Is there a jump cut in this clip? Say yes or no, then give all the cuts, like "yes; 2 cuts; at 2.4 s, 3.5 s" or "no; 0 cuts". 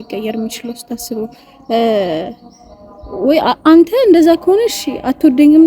no; 0 cuts